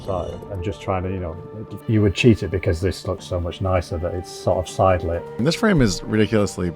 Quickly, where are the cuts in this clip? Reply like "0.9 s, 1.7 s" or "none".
1.8 s, 5.3 s